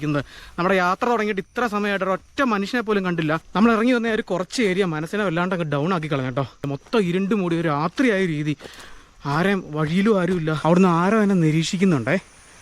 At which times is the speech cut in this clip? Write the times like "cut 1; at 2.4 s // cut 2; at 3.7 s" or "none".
cut 1; at 3.4 s // cut 2; at 6.7 s // cut 3; at 10.6 s

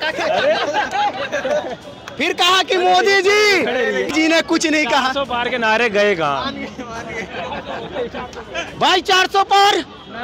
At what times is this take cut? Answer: cut 1; at 4.1 s

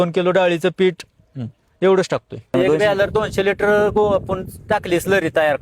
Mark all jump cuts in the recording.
cut 1; at 2.5 s

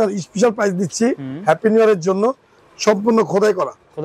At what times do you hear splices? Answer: cut 1; at 2.5 s

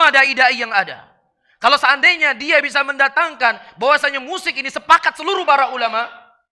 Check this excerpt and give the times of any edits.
none

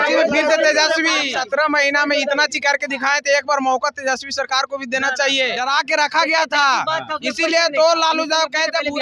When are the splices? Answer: cut 1; at 1.3 s // cut 2; at 5.6 s

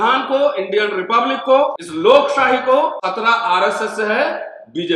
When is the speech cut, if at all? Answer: cut 1; at 1.8 s // cut 2; at 3.0 s

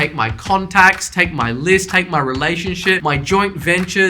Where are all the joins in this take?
cut 1; at 3.0 s

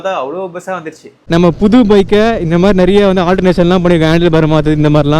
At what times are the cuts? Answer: cut 1; at 1.1 s

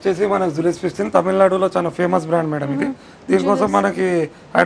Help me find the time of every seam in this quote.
none

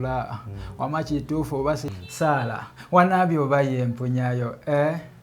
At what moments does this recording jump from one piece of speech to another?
cut 1; at 2.0 s

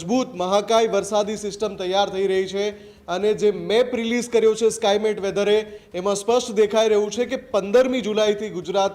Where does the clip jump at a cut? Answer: none

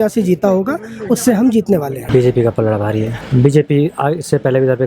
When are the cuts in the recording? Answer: cut 1; at 2.0 s // cut 2; at 3.1 s

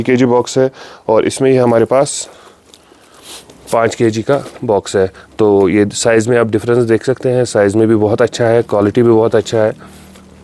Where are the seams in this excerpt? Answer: none

